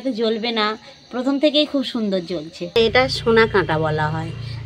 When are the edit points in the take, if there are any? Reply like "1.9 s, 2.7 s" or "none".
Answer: 2.6 s